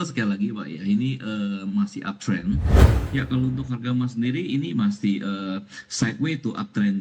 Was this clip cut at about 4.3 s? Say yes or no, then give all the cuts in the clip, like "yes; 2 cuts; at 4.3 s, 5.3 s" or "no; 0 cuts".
no; 1 cut; at 2.8 s